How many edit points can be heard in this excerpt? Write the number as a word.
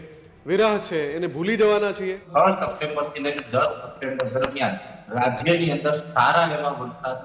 one